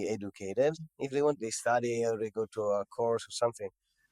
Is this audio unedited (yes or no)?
yes